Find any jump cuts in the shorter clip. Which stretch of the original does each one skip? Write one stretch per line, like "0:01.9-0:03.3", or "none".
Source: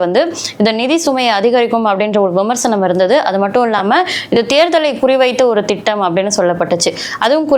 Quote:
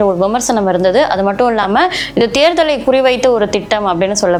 none